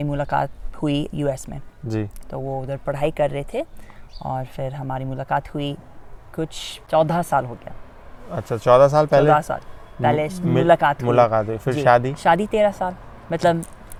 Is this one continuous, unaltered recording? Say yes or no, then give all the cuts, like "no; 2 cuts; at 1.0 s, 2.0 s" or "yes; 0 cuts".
yes; 0 cuts